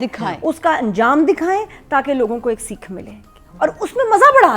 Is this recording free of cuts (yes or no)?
yes